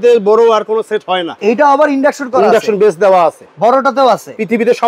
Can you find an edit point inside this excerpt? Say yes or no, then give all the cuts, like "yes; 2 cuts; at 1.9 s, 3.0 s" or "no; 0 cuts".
yes; 1 cut; at 1.3 s